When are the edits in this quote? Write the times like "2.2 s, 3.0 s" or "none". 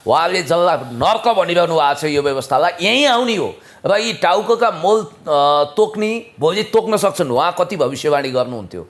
none